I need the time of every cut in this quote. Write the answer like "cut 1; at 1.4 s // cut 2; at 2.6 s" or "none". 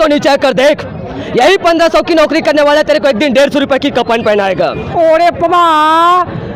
cut 1; at 4.8 s

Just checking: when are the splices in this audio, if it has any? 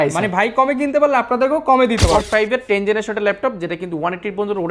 cut 1; at 2.2 s

